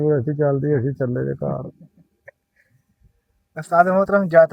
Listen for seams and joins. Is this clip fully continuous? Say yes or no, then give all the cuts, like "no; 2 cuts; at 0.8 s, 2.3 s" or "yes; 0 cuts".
yes; 0 cuts